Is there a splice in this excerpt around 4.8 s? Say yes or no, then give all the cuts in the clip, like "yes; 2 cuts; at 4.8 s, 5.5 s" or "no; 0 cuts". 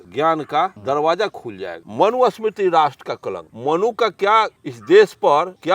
no; 2 cuts; at 1.8 s, 3.4 s